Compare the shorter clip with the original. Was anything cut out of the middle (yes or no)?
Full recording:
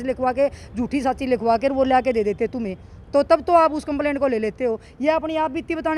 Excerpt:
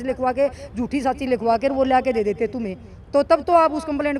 no